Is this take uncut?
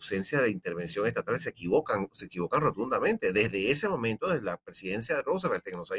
yes; 0 cuts

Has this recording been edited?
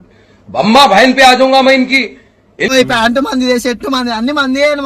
yes; 1 cut; at 2.7 s

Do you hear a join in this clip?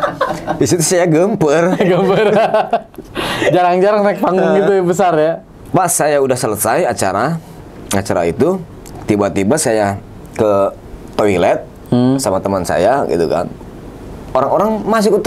no; 0 cuts

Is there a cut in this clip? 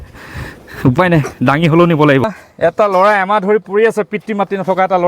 yes; 1 cut; at 2.3 s

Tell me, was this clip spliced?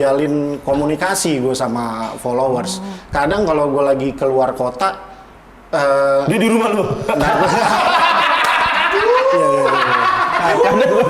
no; 0 cuts

